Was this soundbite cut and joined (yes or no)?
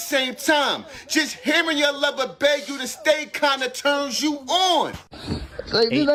no